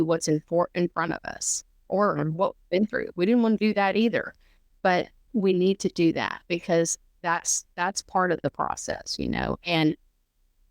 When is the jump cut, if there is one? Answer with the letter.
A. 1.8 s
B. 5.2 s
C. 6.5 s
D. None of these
B